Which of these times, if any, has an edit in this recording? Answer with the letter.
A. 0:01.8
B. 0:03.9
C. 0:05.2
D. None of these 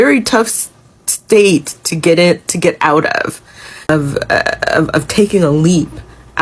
B